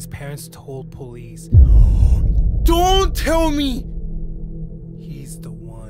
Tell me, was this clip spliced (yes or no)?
no